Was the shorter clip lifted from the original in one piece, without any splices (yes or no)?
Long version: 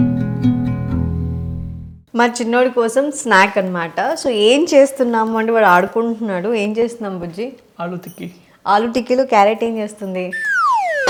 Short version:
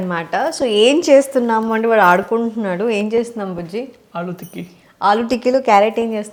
yes